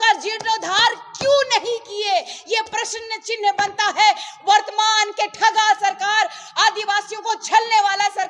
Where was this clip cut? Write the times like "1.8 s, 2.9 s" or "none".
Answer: none